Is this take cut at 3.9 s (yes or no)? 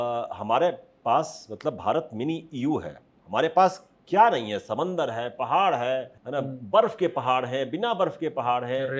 no